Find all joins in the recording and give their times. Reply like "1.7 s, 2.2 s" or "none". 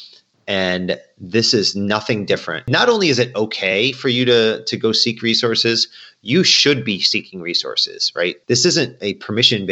2.7 s, 8.4 s